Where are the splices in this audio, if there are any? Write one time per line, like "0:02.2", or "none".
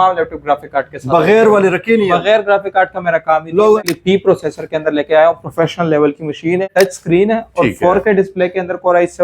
0:03.8
0:06.7